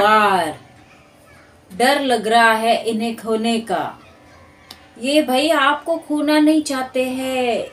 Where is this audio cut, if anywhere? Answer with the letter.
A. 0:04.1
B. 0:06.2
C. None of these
C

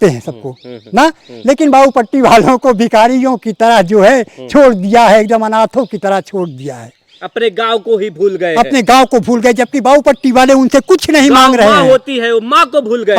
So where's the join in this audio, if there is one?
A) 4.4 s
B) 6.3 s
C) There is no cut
C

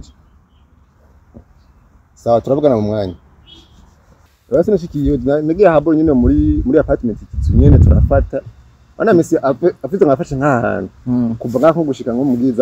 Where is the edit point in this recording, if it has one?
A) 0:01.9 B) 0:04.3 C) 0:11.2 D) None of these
B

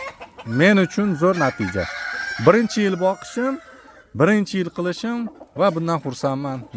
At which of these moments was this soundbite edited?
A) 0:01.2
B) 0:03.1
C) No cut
C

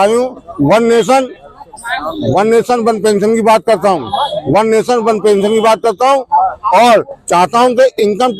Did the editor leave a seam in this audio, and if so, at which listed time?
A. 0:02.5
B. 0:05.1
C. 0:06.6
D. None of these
D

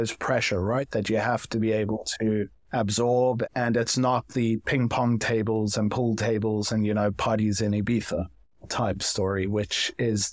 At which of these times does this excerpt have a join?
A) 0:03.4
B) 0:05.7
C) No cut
A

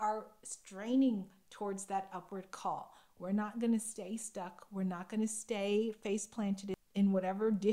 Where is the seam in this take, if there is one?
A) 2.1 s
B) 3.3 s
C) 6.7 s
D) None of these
C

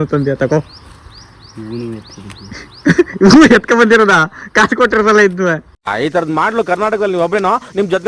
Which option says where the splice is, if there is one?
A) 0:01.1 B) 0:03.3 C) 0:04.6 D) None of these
D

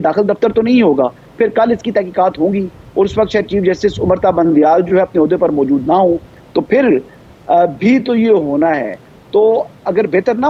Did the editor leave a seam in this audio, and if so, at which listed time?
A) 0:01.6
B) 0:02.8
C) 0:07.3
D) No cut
D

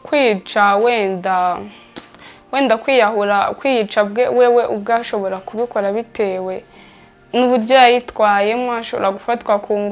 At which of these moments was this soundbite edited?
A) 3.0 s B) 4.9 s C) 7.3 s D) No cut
D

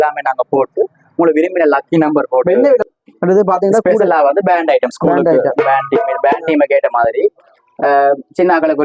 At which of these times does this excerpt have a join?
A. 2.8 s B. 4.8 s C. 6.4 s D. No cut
A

